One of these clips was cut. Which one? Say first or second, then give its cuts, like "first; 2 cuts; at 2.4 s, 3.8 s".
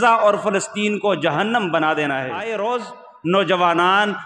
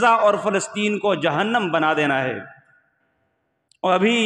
first; 1 cut; at 2.4 s